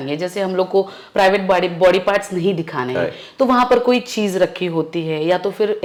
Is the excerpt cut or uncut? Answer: uncut